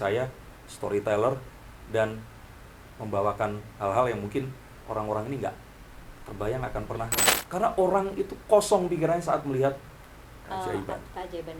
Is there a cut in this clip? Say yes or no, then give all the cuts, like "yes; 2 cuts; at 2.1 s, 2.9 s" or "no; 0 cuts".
yes; 1 cut; at 7.3 s